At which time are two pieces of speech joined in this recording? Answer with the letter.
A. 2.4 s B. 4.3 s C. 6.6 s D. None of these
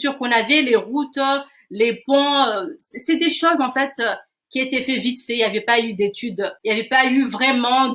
C